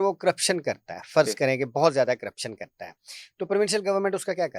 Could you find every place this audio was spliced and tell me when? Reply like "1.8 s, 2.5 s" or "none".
none